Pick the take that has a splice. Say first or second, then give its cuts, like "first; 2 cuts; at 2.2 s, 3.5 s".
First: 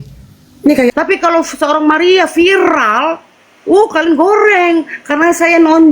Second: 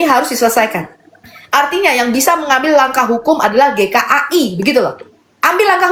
first; 1 cut; at 0.9 s